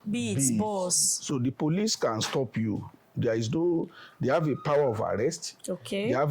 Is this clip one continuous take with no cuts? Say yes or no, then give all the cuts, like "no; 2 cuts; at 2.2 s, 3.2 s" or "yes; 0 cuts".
no; 1 cut; at 1.1 s